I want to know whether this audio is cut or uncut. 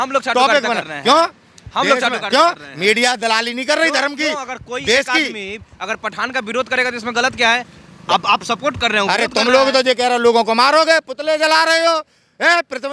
uncut